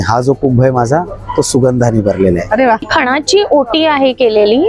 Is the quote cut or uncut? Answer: cut